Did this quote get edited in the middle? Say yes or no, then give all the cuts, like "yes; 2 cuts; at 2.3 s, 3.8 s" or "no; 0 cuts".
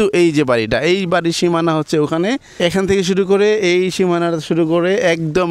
yes; 1 cut; at 2.5 s